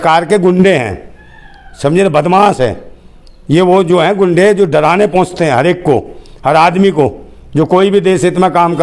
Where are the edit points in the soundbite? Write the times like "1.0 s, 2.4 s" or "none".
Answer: none